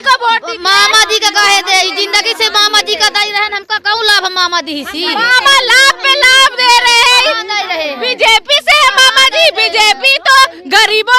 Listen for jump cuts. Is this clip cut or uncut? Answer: uncut